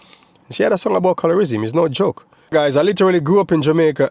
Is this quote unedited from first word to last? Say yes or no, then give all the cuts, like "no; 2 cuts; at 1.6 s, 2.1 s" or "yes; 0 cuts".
no; 1 cut; at 2.3 s